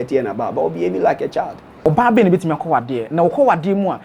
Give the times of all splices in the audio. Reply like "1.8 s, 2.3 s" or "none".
1.8 s